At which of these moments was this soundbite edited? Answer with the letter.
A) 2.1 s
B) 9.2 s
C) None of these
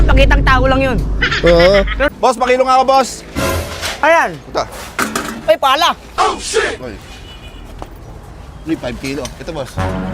A